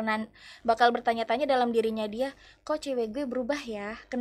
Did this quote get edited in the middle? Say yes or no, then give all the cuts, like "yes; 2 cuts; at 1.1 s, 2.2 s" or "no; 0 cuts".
no; 0 cuts